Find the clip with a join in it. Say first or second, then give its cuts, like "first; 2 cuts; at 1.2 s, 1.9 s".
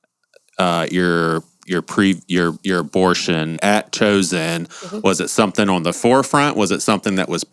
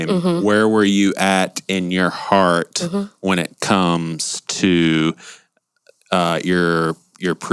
first; 1 cut; at 3.6 s